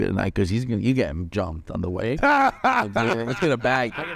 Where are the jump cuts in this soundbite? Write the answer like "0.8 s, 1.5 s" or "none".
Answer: none